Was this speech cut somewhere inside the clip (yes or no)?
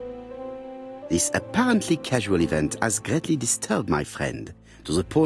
yes